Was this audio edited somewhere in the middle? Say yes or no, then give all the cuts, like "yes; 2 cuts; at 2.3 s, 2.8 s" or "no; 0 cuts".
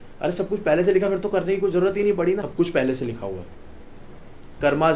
yes; 1 cut; at 2.5 s